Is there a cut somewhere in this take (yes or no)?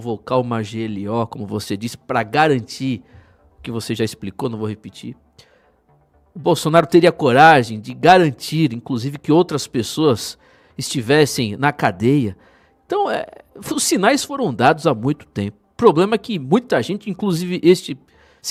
no